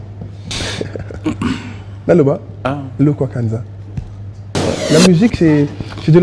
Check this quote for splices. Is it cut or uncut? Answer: cut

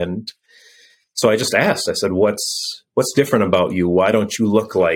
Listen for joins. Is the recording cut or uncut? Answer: uncut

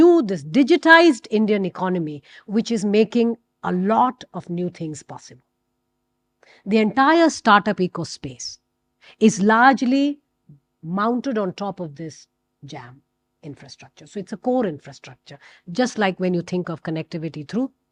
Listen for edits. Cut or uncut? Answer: uncut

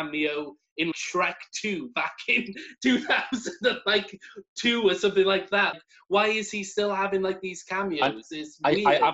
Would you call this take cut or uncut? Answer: cut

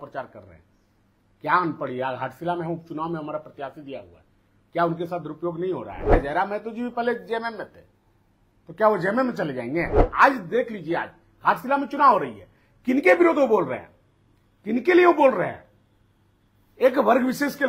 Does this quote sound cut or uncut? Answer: cut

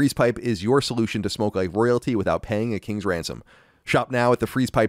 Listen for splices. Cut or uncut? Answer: uncut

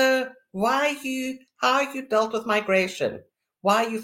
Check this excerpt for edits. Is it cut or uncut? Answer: uncut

